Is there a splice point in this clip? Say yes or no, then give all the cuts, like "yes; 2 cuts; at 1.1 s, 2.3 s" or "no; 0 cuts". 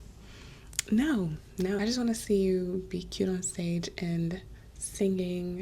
yes; 1 cut; at 1.8 s